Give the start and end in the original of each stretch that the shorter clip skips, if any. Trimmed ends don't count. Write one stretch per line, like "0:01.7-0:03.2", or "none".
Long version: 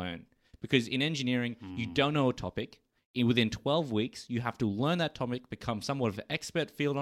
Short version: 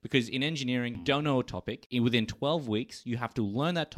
0:01.6-0:01.9
0:02.7-0:03.0